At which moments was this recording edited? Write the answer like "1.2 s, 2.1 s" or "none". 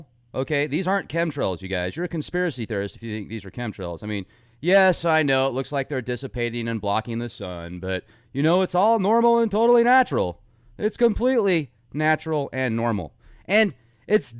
9.5 s